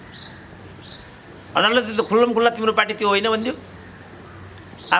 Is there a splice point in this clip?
no; 0 cuts

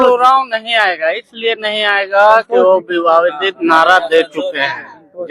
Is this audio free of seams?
yes; 0 cuts

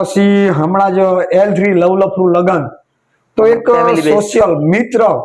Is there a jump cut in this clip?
no; 0 cuts

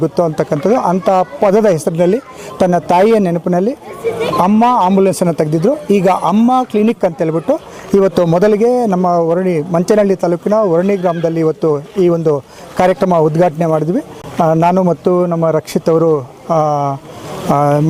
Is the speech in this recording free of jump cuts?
yes; 0 cuts

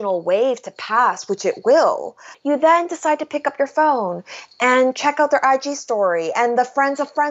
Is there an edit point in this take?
yes; 1 cut; at 2.3 s

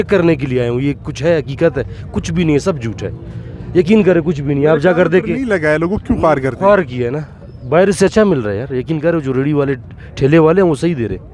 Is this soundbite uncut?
yes; 0 cuts

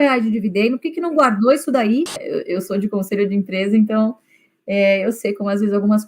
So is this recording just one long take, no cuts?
no; 1 cut; at 2.2 s

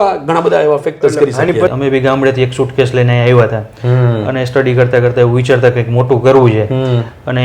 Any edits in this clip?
yes; 1 cut; at 1.7 s

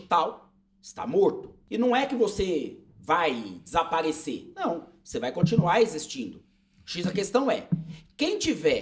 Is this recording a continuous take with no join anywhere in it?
no; 1 cut; at 1.5 s

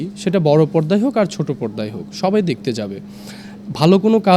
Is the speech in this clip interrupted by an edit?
no; 0 cuts

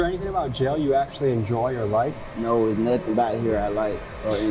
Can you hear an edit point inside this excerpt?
no; 0 cuts

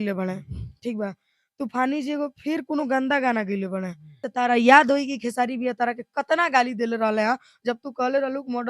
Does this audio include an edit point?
yes; 1 cut; at 4.3 s

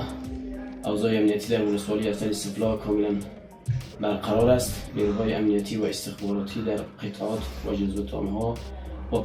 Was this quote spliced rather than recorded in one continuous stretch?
no; 0 cuts

